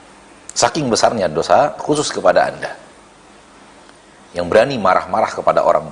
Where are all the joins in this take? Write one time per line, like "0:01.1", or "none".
0:01.8